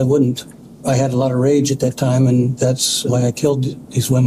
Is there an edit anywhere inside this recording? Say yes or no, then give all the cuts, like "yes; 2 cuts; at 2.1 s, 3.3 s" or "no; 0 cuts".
yes; 1 cut; at 2.9 s